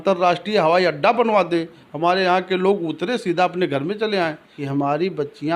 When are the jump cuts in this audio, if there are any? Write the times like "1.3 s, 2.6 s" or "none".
4.5 s